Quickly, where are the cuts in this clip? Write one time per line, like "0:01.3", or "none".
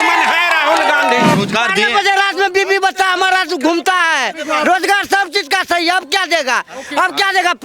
0:01.3

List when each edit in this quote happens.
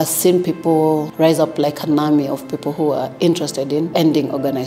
0:01.1
0:03.9

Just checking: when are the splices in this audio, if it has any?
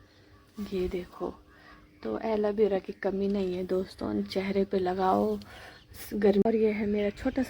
0:06.4

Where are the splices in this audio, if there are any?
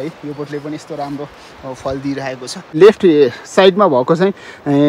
0:02.8

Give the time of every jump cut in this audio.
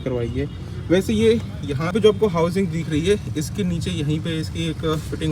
0:01.9

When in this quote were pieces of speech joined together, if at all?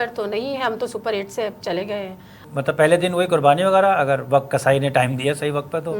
0:02.4

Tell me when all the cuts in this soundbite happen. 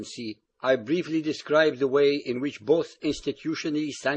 none

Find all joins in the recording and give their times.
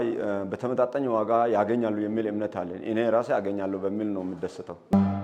none

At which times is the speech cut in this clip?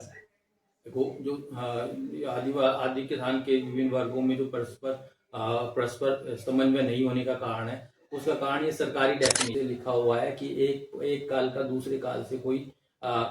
0:09.5

